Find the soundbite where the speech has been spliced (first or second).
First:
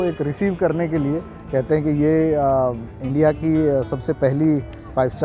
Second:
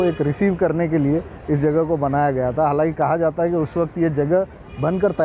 first